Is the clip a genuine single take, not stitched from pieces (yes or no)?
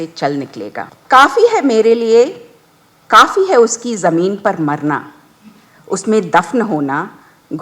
no